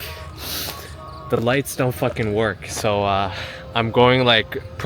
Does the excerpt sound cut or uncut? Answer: uncut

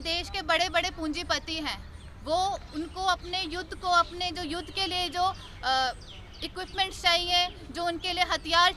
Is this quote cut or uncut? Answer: uncut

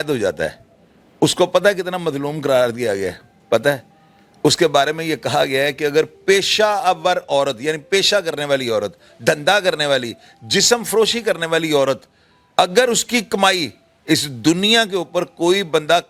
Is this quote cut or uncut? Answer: uncut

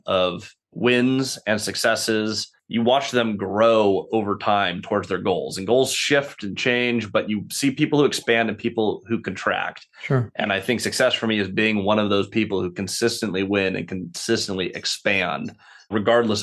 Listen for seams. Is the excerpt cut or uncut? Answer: uncut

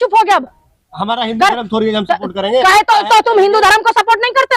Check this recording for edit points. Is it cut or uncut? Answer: uncut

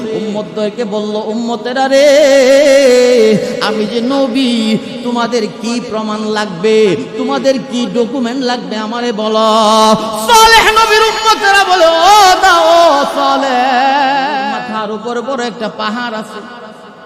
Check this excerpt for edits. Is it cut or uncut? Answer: cut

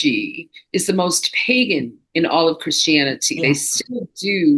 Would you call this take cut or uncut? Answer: uncut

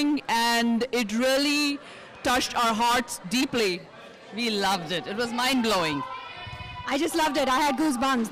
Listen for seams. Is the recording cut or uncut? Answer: uncut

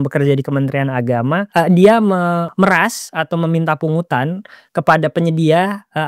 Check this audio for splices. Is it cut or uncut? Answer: cut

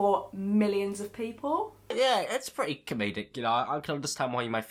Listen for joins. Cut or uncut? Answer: uncut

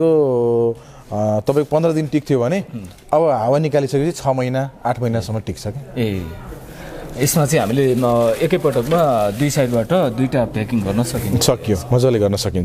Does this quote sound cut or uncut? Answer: uncut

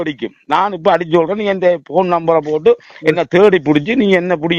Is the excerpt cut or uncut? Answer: uncut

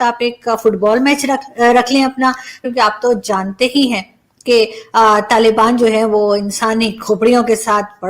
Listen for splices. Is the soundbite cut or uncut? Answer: cut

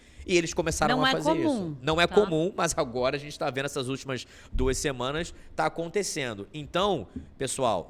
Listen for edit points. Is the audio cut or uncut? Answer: uncut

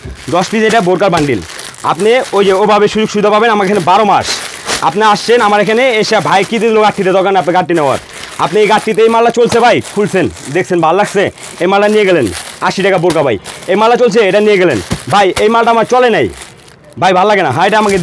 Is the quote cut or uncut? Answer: uncut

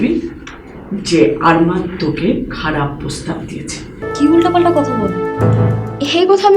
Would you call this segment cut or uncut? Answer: cut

